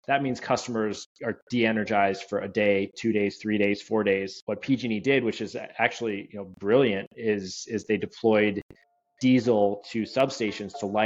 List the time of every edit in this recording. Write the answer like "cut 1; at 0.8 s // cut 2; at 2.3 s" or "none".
cut 1; at 4.4 s